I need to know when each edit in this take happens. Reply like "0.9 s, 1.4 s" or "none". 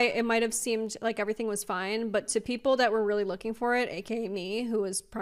none